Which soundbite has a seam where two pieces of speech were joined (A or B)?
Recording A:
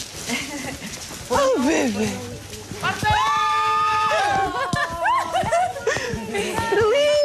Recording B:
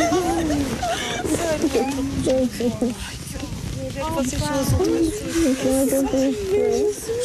B